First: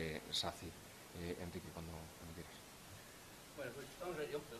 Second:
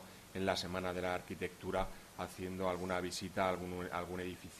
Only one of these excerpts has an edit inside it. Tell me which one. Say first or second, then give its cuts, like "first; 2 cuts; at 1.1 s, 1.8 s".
second; 1 cut; at 3.1 s